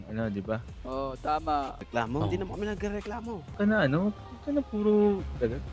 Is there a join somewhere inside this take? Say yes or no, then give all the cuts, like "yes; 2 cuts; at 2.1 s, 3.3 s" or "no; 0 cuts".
yes; 1 cut; at 3.5 s